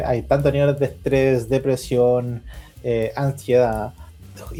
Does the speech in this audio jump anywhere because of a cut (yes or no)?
no